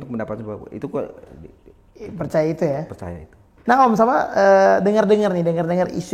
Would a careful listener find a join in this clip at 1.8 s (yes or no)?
no